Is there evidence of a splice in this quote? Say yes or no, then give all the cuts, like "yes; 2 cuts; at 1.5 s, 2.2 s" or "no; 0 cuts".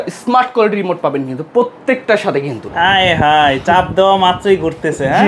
yes; 1 cut; at 2.6 s